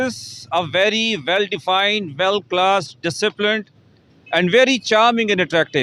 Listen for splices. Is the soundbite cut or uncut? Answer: uncut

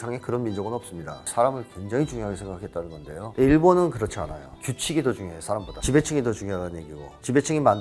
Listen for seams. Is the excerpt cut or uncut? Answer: cut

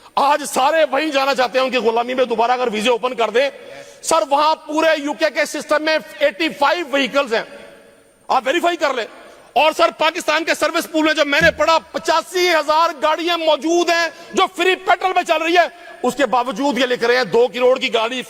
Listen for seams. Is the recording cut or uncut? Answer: uncut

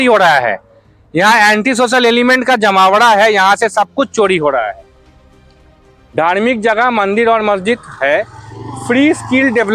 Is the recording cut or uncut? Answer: uncut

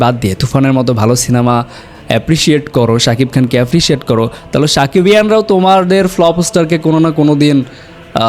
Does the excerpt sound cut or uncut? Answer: uncut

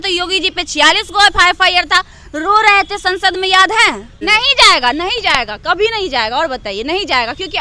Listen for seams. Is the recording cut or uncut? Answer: cut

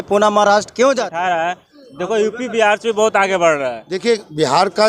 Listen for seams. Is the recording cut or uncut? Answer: cut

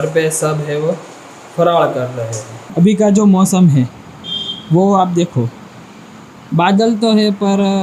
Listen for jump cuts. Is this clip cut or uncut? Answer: cut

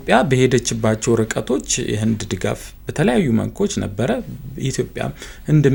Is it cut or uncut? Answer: uncut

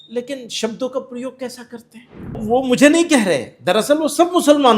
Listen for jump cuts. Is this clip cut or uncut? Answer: cut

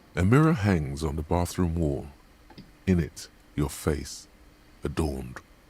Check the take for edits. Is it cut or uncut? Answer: cut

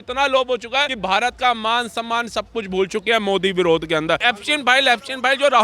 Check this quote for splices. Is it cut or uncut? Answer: cut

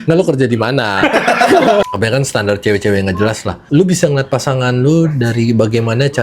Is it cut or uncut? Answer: cut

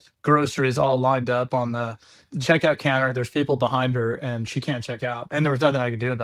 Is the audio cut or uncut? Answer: cut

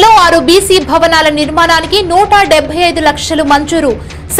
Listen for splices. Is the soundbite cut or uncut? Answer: uncut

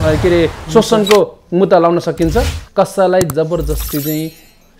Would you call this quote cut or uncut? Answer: cut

